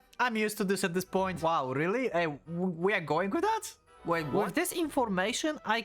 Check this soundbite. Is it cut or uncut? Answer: cut